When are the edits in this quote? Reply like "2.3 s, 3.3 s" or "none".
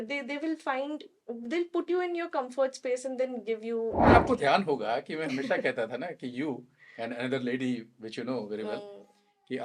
4.1 s